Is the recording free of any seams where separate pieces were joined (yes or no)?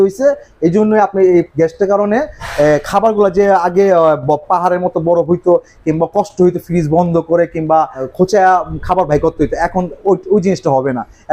no